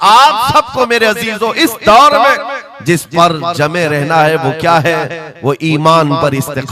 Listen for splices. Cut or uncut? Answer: uncut